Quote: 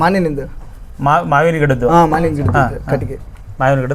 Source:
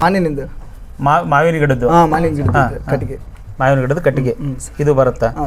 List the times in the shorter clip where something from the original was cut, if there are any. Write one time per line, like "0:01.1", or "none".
none